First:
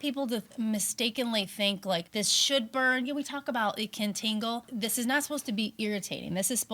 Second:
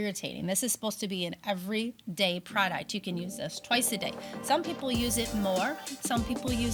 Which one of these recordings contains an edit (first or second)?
first